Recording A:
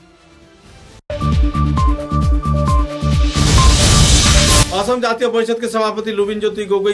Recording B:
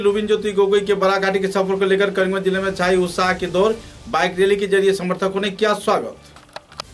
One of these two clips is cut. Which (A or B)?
A